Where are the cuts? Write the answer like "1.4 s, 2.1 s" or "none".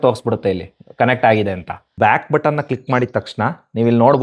1.9 s